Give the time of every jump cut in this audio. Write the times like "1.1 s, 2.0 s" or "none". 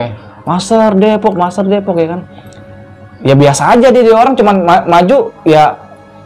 none